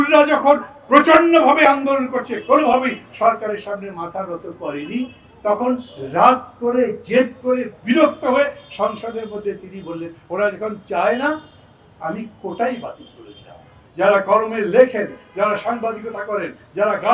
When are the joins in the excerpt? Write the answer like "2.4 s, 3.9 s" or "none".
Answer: 13.8 s